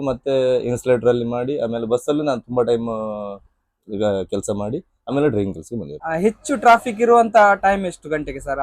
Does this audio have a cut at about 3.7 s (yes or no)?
no